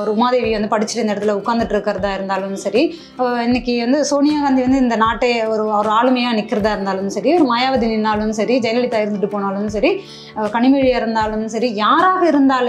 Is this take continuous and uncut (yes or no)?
yes